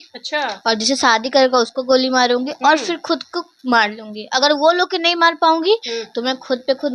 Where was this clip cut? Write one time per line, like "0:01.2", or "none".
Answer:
none